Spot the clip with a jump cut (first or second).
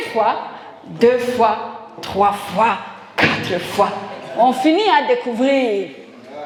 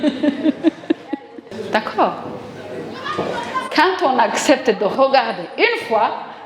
second